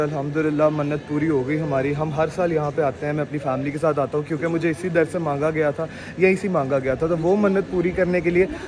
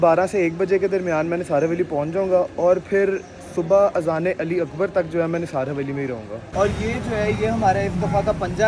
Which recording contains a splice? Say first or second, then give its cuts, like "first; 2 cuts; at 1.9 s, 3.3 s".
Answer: second; 1 cut; at 6.4 s